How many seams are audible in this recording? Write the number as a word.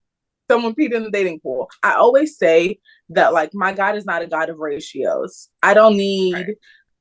one